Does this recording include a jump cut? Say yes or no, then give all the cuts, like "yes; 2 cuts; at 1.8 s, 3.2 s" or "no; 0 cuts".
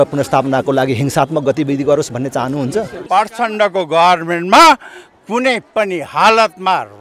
yes; 1 cut; at 3.0 s